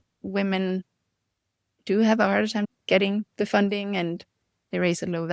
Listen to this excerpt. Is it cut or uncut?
uncut